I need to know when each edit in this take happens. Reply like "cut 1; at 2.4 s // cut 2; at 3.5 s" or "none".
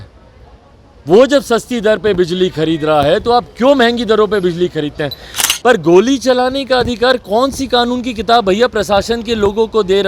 cut 1; at 5.4 s